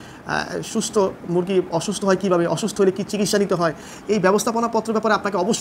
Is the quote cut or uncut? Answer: uncut